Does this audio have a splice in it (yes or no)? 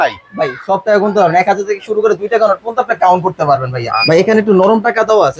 yes